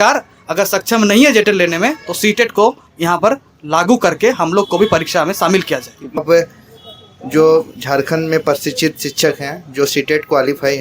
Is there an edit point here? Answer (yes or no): yes